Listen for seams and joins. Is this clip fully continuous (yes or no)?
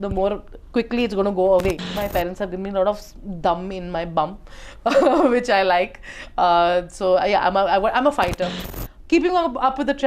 no